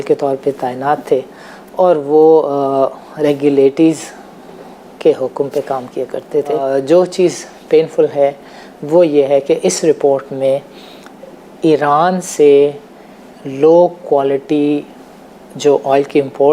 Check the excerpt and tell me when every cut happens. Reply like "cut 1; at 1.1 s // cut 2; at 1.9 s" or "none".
cut 1; at 6.6 s